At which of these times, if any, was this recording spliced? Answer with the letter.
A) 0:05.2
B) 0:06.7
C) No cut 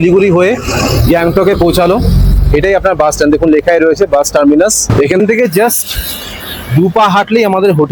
A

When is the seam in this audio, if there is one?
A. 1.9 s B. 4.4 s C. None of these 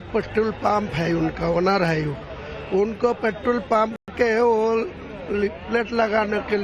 C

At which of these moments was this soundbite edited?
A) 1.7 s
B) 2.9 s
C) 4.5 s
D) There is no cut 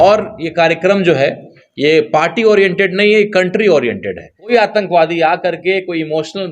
C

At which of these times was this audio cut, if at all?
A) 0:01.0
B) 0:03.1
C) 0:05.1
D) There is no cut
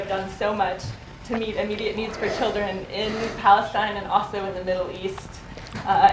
B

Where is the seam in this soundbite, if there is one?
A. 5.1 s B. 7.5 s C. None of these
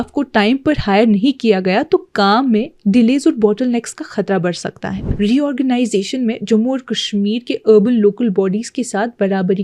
A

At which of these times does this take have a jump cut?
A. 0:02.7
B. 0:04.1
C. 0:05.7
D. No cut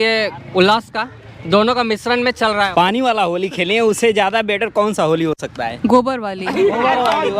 A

